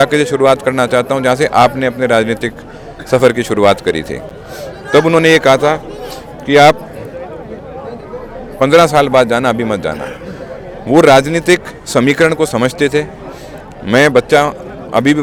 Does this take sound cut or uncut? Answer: uncut